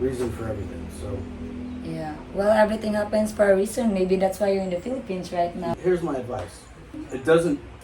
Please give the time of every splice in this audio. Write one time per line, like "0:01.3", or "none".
0:05.7
0:06.9